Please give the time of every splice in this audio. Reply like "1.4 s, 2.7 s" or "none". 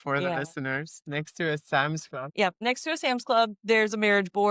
2.5 s